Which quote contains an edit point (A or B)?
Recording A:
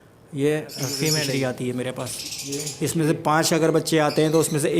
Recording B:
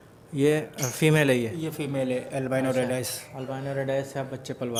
A